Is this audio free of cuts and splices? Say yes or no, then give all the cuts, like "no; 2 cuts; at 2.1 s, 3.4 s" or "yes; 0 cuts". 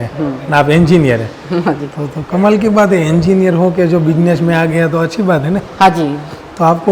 yes; 0 cuts